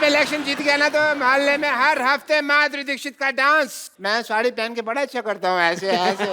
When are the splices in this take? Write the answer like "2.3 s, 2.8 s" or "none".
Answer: 3.9 s

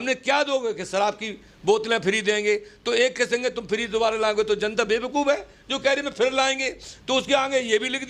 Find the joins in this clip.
none

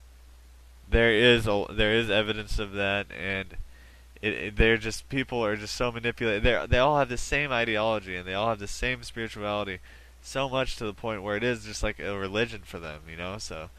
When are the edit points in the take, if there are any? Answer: 11.7 s

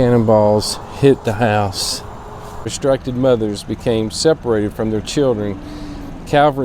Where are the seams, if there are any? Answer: 2.6 s

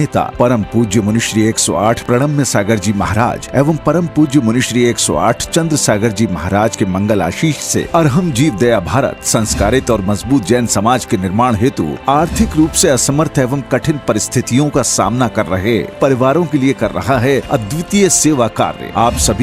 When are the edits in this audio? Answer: none

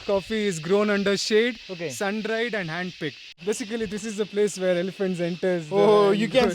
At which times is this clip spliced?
3.4 s

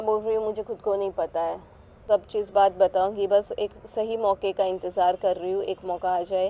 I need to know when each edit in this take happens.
2.0 s

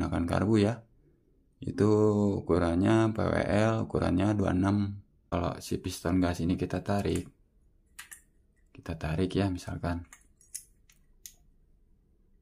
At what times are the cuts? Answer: 5.3 s

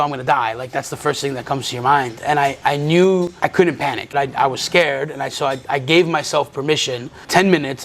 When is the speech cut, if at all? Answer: none

